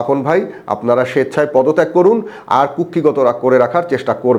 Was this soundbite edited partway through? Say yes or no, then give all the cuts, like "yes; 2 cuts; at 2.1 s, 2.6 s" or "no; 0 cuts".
no; 0 cuts